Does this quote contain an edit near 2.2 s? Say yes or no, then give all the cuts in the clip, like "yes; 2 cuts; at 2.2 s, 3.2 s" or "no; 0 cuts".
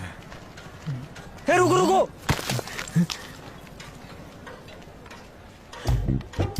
no; 0 cuts